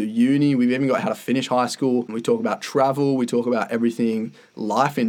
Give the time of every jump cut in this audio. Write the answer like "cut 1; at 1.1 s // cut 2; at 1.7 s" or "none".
cut 1; at 2.1 s